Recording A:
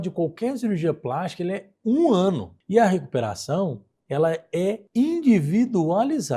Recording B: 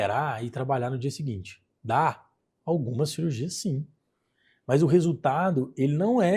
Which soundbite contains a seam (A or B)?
A